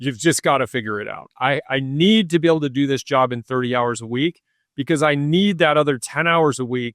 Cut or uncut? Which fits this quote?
cut